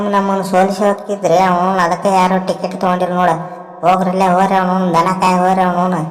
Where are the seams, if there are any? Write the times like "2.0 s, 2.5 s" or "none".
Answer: none